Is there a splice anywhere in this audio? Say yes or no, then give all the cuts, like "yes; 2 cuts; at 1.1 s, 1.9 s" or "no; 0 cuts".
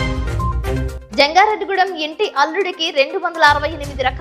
yes; 1 cut; at 0.9 s